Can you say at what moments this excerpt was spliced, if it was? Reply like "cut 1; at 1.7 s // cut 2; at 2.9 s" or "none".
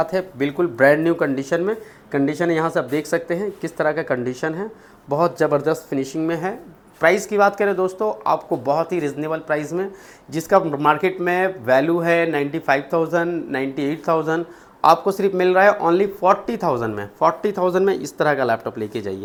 none